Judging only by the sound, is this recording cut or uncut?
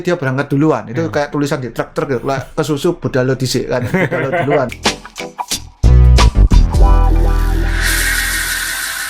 cut